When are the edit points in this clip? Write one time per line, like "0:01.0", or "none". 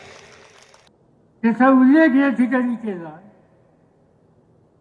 0:01.0